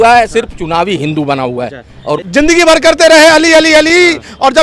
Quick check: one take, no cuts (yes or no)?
no